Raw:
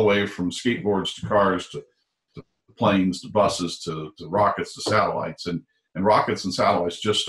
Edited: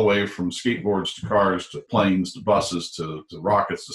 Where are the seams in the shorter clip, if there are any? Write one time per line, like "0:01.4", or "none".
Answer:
0:01.7

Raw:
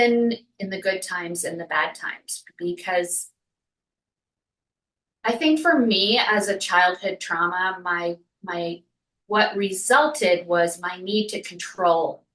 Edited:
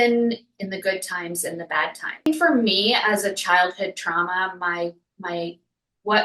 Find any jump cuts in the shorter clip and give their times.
0:02.3

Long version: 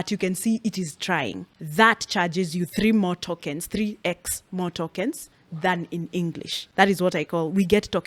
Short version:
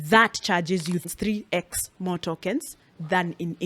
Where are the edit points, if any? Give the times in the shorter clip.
0:01.0

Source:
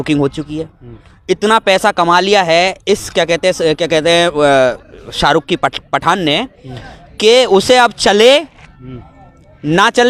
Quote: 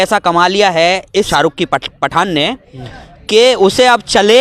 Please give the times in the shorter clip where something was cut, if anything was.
0:01.3

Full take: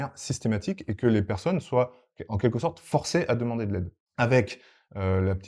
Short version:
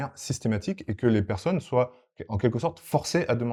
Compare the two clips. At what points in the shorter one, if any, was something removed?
none

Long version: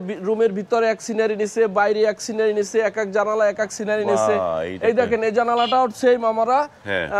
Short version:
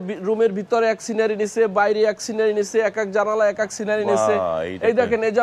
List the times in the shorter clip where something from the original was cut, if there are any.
none

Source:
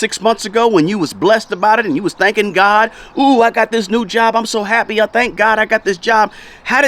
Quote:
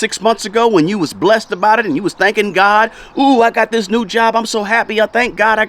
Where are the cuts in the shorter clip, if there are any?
none

